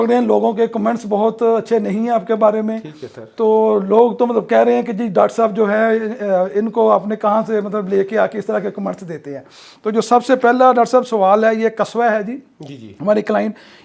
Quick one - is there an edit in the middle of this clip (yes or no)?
no